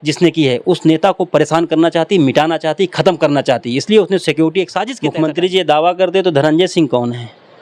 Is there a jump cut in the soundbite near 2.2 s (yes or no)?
no